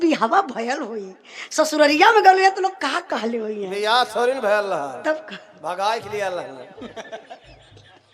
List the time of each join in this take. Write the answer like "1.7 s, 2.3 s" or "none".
none

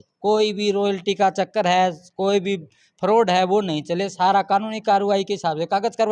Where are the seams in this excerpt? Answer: none

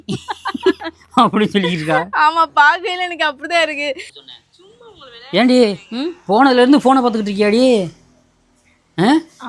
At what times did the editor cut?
4.1 s

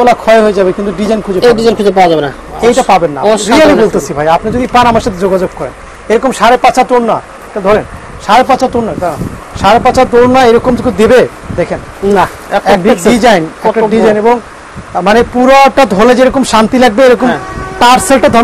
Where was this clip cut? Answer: none

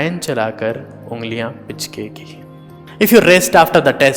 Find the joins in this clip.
2.8 s

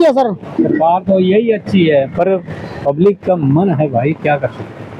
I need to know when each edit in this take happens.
none

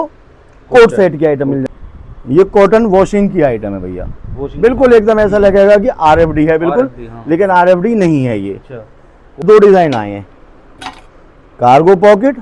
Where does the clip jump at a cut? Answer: 1.6 s, 9.4 s

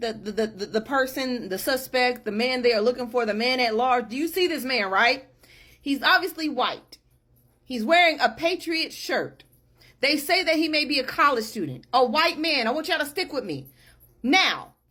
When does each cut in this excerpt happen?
none

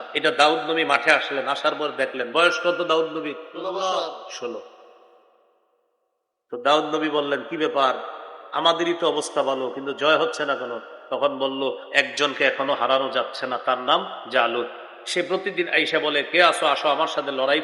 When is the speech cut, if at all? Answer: none

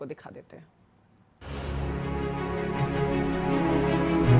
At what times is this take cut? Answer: 1.7 s

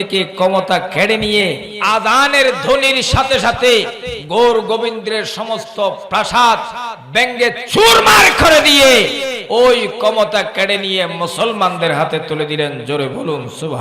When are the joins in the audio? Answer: 1.7 s

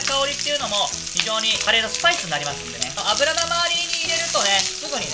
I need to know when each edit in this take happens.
none

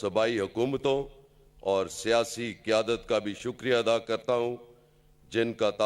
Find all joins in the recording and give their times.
none

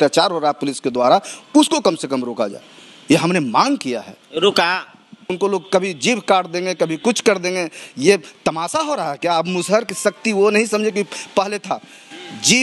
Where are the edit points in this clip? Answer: 5.3 s

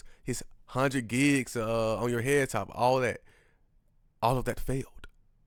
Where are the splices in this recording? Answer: none

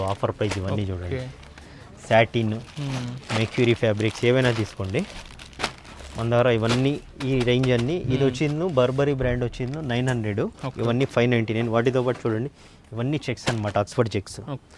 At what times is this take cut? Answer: none

